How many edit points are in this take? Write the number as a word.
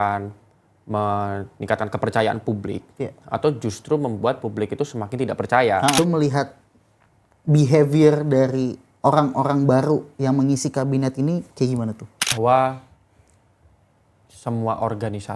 two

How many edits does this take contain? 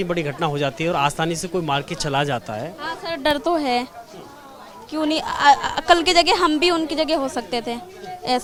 zero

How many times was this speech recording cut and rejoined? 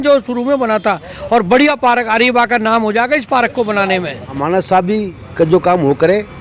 one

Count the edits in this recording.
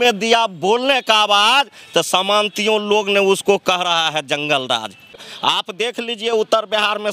one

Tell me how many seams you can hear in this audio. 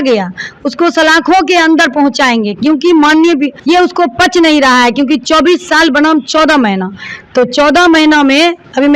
one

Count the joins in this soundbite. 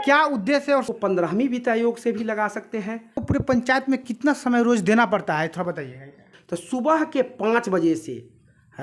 three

